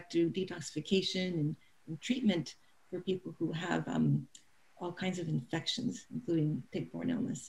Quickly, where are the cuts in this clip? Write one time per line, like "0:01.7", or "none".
none